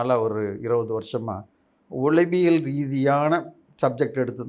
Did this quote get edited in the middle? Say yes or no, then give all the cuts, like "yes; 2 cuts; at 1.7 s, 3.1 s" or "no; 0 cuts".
no; 0 cuts